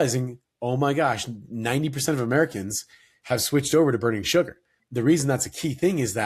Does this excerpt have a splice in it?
no; 0 cuts

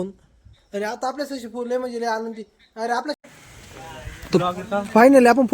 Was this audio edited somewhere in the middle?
yes; 1 cut; at 3.2 s

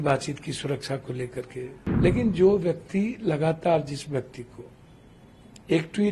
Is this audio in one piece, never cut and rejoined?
no; 1 cut; at 1.8 s

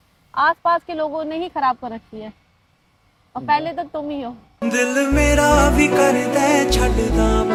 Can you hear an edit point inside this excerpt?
no; 0 cuts

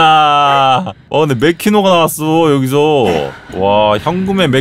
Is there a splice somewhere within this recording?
yes; 2 cuts; at 1.0 s, 3.4 s

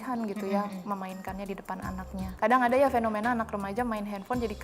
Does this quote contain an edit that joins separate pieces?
yes; 1 cut; at 2.2 s

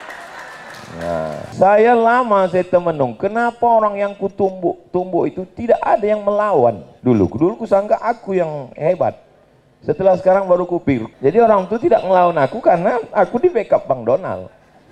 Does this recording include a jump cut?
yes; 3 cuts; at 1.5 s, 6.9 s, 11.1 s

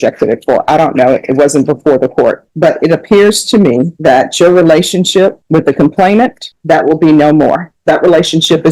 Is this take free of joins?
no; 5 cuts; at 2.5 s, 3.9 s, 5.4 s, 6.5 s, 7.7 s

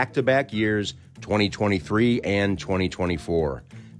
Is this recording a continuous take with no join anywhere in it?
yes; 0 cuts

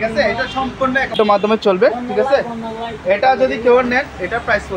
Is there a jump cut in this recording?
yes; 1 cut; at 1.1 s

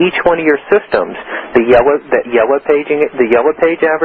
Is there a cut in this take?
no; 0 cuts

